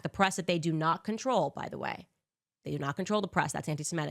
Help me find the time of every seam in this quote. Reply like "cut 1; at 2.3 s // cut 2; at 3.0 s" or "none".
none